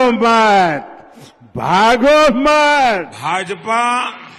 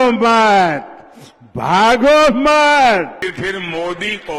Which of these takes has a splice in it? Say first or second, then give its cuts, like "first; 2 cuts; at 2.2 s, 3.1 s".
first; 1 cut; at 3.1 s